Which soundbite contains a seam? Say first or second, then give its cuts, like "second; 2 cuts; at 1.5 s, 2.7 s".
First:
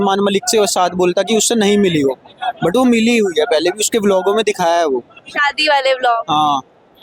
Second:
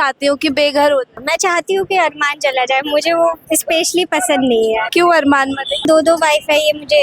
second; 3 cuts; at 1.2 s, 4.9 s, 5.9 s